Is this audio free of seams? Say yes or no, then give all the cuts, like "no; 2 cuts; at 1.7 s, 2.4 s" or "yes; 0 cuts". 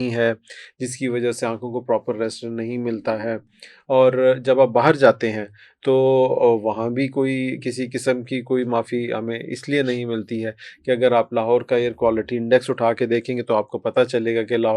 yes; 0 cuts